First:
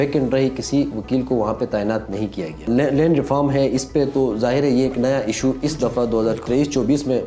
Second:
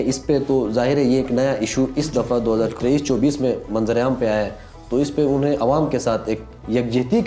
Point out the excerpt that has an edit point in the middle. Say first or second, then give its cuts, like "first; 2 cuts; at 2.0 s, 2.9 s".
first; 1 cut; at 2.6 s